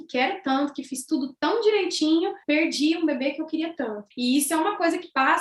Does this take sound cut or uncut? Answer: cut